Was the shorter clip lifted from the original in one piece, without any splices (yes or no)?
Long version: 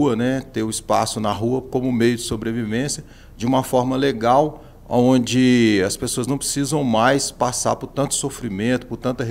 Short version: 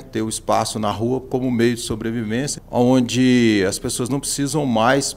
no